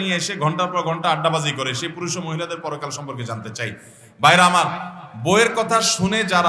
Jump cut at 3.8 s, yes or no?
no